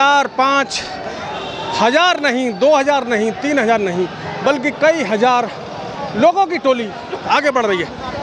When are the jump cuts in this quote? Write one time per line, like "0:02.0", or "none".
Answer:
none

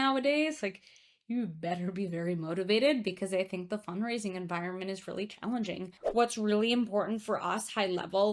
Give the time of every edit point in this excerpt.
0:05.9

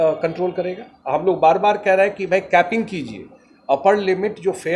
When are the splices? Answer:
0:00.9

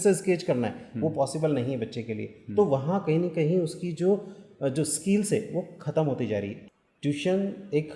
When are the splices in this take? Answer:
0:06.6

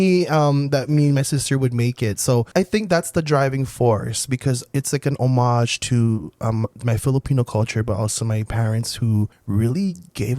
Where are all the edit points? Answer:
0:02.5
0:09.4

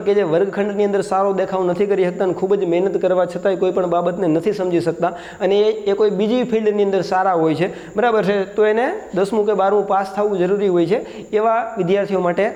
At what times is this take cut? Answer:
none

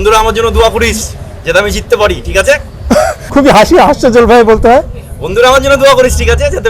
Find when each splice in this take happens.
0:03.3

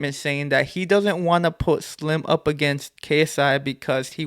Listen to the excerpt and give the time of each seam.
none

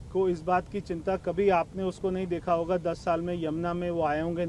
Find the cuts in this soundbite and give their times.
none

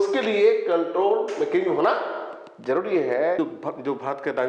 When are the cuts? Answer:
0:03.4

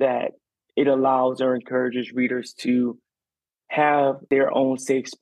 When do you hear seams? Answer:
0:04.2

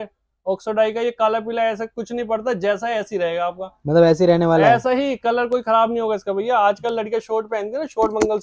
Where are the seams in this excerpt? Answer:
none

